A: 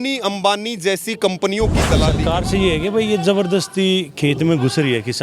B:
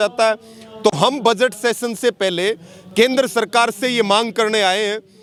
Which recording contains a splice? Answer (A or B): A